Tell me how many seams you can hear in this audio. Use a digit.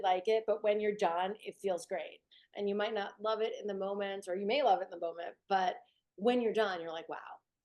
1